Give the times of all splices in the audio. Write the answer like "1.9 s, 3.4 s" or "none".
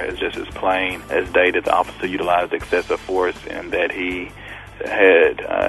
1.0 s, 4.7 s